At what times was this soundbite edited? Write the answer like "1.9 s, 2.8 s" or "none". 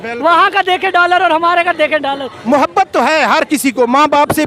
2.3 s